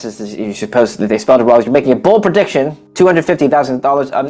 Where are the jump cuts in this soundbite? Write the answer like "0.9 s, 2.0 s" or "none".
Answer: 2.8 s